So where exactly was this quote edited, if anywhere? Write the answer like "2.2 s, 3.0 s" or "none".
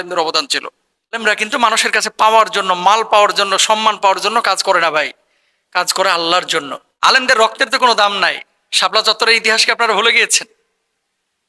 1.2 s, 6.8 s